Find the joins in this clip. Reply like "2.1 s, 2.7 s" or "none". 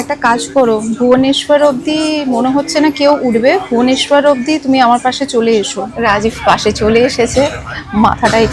5.8 s